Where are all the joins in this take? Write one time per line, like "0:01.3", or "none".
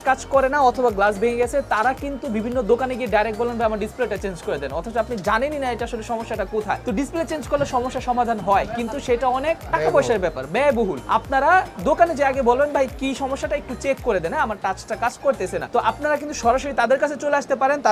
none

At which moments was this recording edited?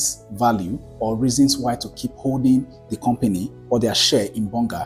none

